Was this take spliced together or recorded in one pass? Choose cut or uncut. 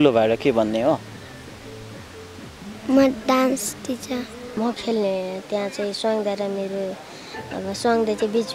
cut